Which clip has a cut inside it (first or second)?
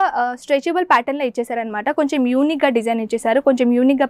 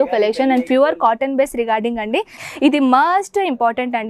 second